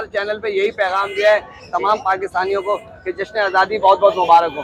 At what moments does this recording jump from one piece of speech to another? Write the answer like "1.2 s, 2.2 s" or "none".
none